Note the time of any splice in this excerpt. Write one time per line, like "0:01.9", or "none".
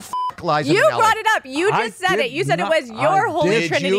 0:01.4